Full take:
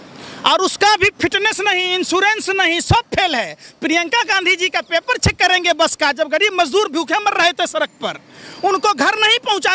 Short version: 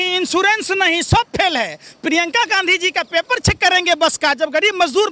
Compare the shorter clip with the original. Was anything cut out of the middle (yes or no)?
no